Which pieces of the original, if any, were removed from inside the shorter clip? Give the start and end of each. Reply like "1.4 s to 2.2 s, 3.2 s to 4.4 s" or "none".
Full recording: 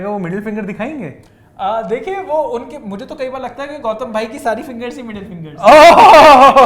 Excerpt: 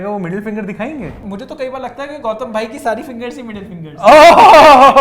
1.2 s to 2.9 s